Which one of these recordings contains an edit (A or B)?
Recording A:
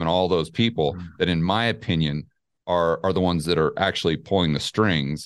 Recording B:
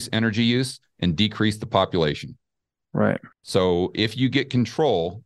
B